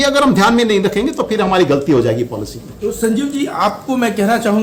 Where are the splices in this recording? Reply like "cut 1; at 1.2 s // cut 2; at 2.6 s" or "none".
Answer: none